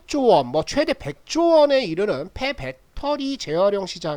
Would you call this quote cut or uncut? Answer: uncut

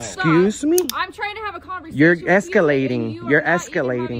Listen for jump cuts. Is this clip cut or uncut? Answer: uncut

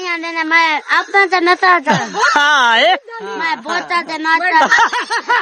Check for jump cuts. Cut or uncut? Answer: uncut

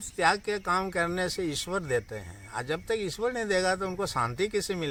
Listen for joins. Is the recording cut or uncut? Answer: uncut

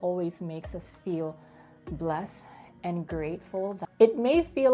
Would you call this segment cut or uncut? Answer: cut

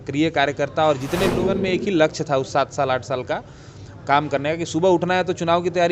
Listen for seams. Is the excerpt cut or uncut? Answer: cut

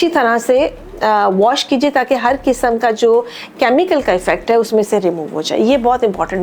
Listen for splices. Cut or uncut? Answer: uncut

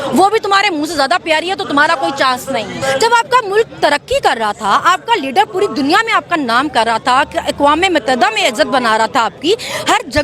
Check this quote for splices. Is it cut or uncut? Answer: cut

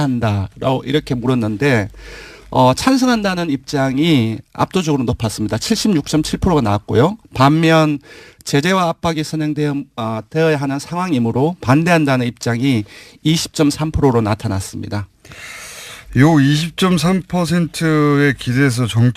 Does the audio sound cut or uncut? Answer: cut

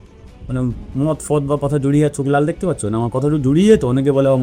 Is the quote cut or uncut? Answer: uncut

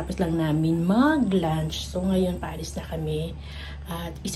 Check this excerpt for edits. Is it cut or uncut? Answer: uncut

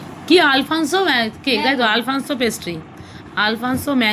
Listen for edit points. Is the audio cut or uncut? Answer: uncut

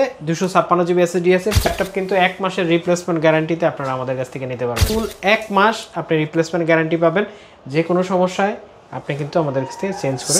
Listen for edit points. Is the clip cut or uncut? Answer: cut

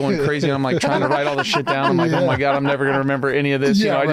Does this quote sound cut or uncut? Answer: uncut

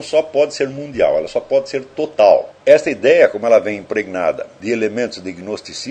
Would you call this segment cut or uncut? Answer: cut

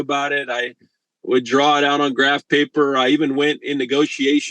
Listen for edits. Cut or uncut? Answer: uncut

